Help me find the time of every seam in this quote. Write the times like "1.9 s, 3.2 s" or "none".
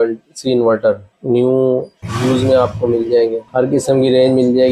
1.1 s, 2.1 s, 3.4 s